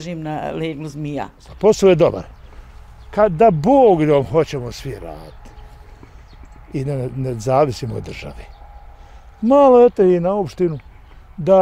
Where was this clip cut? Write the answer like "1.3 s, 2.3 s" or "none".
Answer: 1.5 s